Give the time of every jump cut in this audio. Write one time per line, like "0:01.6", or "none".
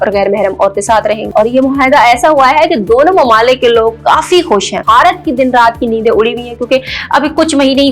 0:01.2
0:04.8